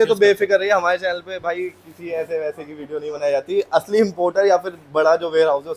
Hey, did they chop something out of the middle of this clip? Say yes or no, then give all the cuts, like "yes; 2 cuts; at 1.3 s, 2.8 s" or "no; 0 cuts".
no; 0 cuts